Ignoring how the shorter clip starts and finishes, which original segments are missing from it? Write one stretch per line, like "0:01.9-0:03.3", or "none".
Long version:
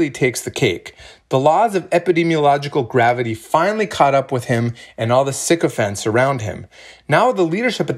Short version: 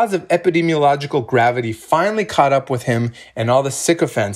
none